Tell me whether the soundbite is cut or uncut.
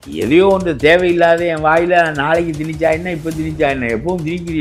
uncut